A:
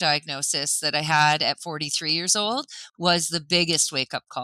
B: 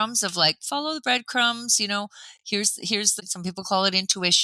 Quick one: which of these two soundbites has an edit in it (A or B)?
B